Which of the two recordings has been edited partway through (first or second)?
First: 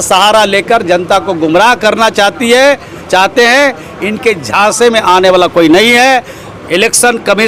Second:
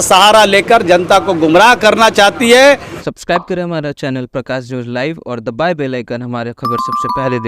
second